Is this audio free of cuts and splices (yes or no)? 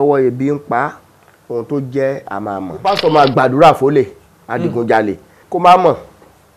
no